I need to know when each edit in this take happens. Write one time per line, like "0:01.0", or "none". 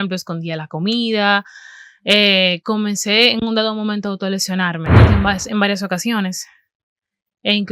0:05.0